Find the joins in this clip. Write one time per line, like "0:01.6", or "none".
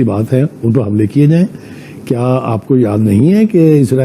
none